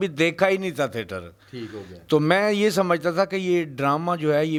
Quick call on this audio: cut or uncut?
uncut